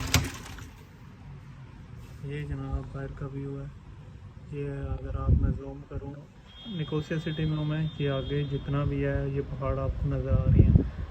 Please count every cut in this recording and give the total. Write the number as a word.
zero